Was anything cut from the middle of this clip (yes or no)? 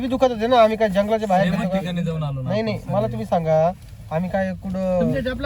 no